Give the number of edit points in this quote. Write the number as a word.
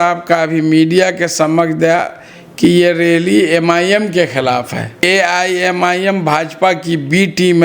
one